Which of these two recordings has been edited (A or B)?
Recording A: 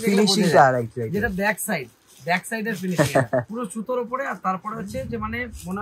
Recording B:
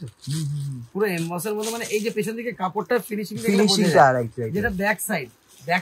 A